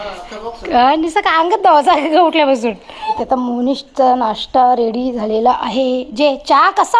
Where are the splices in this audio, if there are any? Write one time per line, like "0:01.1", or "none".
0:03.2